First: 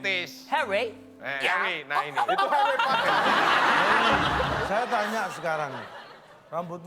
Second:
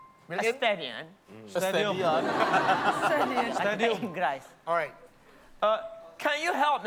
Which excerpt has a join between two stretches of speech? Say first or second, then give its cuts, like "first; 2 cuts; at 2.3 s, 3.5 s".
first; 1 cut; at 4.6 s